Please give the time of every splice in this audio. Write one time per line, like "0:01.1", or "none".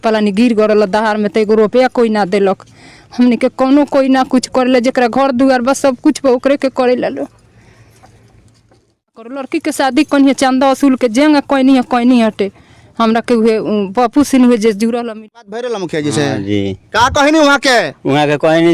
0:09.4
0:15.1